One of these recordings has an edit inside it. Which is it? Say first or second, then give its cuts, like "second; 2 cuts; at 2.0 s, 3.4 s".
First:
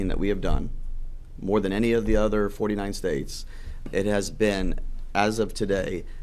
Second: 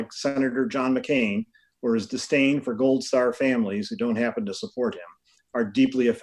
first; 1 cut; at 3.8 s